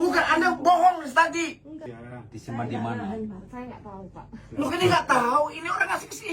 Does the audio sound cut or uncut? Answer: cut